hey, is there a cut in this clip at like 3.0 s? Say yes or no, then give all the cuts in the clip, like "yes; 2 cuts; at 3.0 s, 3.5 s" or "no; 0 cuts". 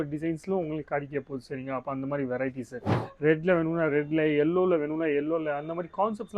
yes; 1 cut; at 3.0 s